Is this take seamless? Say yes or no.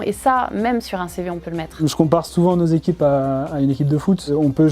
yes